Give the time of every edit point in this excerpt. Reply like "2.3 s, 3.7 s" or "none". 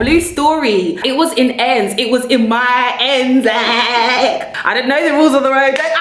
1.0 s, 4.4 s